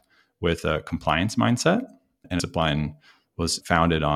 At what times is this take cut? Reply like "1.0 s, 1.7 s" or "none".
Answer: 2.4 s